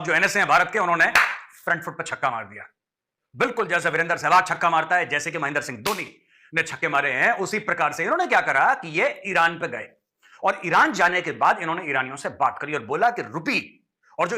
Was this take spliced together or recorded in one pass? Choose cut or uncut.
uncut